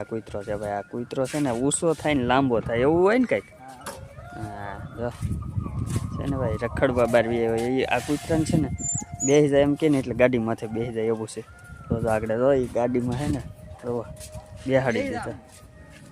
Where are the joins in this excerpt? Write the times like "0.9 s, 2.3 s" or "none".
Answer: none